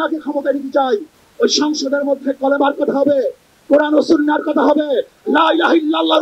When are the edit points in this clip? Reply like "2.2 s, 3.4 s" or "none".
1.2 s